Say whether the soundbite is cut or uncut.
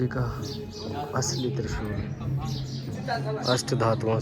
uncut